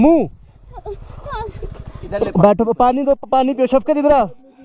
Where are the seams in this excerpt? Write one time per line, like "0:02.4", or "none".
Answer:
none